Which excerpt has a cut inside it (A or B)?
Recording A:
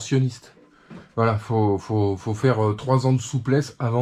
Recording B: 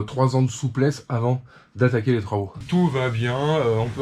B